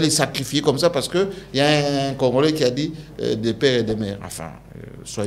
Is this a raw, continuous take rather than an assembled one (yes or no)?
yes